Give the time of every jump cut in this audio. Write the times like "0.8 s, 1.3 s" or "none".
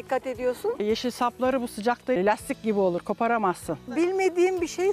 2.2 s, 4.0 s